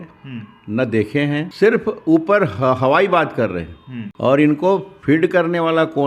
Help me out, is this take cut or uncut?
cut